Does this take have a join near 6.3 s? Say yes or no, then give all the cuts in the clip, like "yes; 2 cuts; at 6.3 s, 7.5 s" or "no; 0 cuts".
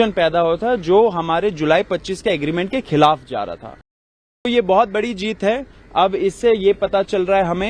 no; 1 cut; at 4.5 s